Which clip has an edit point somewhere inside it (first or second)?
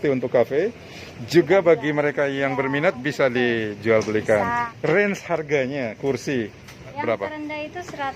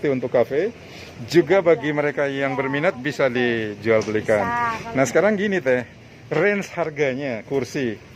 first